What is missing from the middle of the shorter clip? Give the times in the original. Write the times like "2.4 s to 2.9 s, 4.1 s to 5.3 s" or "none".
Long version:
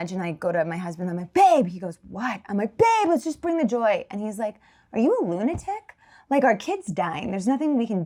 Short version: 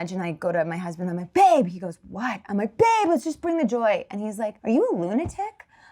4.5 s to 4.8 s